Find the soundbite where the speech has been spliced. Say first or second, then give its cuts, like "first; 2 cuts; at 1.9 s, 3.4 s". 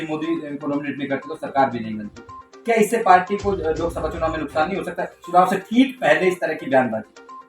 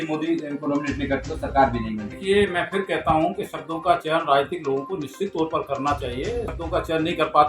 second; 2 cuts; at 2.1 s, 6.6 s